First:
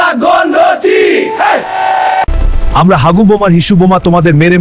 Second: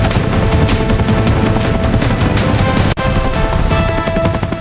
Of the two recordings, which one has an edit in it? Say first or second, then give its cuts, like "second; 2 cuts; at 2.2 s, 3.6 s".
first; 1 cut; at 2.3 s